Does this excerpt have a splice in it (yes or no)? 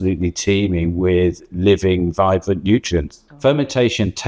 yes